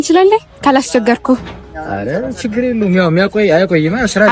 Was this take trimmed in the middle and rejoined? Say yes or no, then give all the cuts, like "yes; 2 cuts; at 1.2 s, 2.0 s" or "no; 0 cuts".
no; 0 cuts